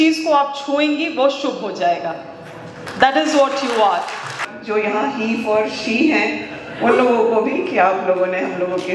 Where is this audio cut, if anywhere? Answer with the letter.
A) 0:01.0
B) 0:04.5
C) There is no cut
B